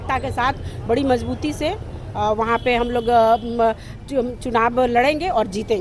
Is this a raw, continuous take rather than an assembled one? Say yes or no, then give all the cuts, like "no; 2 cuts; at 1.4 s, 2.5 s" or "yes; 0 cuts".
yes; 0 cuts